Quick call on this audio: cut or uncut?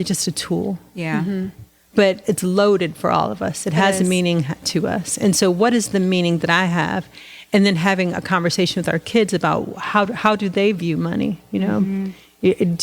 cut